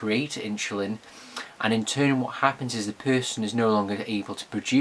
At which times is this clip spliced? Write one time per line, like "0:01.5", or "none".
0:02.9